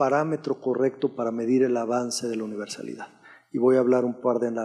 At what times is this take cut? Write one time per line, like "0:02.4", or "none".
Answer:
none